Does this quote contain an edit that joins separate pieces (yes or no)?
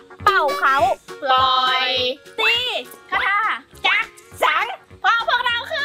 yes